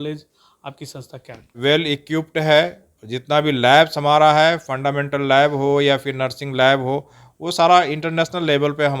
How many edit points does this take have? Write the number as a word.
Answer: one